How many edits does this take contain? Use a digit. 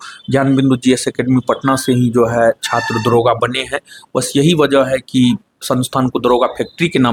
0